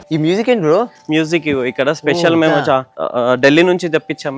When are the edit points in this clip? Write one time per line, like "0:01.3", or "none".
0:03.0